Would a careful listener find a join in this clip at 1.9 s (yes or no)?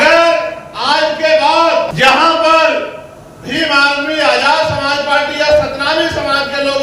yes